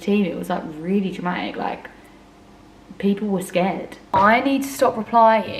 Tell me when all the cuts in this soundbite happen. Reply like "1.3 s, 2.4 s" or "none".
3.9 s